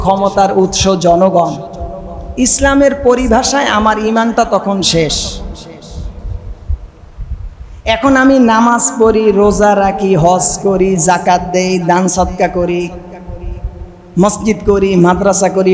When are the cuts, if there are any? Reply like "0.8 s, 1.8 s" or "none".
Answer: none